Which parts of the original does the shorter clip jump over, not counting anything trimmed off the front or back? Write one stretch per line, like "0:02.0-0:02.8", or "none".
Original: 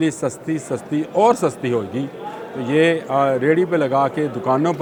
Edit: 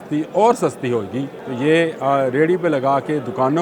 0:02.2-0:02.5